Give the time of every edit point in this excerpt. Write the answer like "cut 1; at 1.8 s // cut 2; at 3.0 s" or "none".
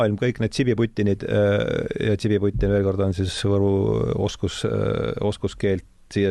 none